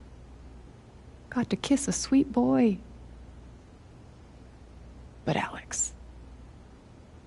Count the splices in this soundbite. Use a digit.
1